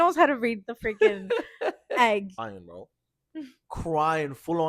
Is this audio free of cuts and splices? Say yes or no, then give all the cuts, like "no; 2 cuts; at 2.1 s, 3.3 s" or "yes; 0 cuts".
no; 1 cut; at 2.4 s